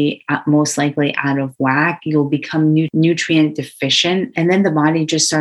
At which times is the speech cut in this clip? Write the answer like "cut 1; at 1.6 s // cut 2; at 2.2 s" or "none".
cut 1; at 2.9 s // cut 2; at 4.3 s